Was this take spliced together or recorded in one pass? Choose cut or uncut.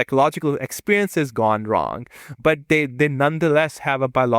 uncut